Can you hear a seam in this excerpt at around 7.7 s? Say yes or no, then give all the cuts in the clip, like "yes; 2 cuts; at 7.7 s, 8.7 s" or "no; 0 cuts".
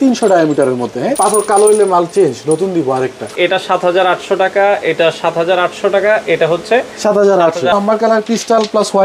yes; 3 cuts; at 1.1 s, 3.3 s, 7.7 s